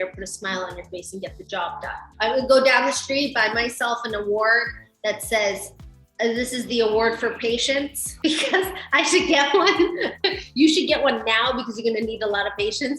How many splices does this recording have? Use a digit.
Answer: 2